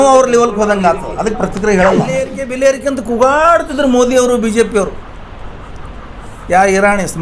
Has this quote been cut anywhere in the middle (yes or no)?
yes